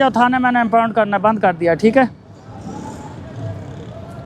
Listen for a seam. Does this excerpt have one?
no; 0 cuts

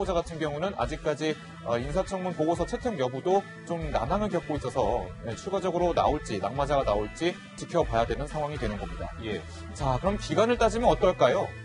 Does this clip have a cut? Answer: yes; 1 cut; at 10.6 s

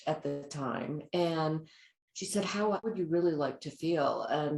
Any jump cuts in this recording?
yes; 1 cut; at 2.9 s

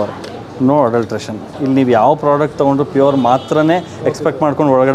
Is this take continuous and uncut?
yes; 0 cuts

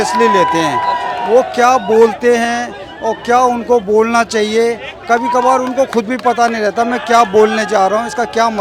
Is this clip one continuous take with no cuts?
yes; 0 cuts

